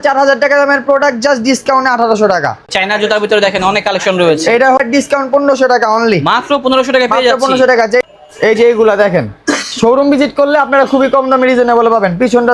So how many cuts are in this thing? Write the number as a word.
three